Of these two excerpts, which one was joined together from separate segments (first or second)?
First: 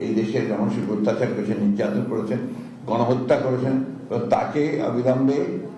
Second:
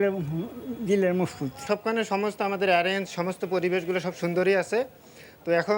second